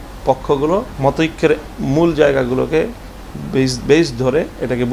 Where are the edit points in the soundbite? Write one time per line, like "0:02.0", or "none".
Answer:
0:00.9

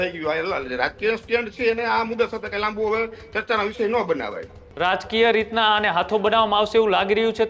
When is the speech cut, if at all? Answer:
0:04.6

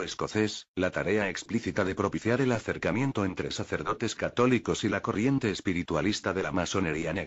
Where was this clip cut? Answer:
0:06.2

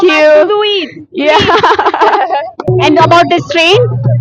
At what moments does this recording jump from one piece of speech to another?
0:02.7

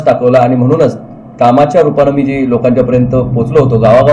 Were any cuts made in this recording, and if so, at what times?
none

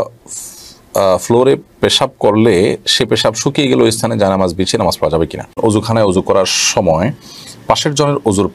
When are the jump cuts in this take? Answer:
0:05.6

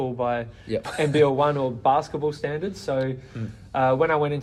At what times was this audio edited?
none

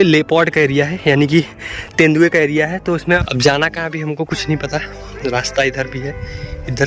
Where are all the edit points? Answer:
0:03.3

